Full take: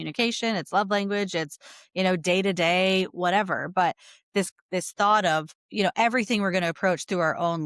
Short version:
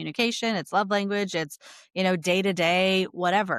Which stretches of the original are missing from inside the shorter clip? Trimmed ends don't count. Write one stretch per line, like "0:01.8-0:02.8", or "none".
none